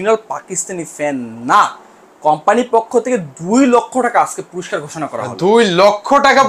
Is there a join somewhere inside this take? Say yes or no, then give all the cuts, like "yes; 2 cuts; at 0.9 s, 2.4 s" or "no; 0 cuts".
no; 0 cuts